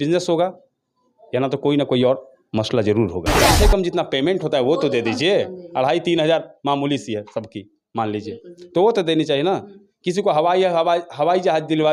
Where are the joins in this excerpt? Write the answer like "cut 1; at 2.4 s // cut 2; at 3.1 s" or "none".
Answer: cut 1; at 3.5 s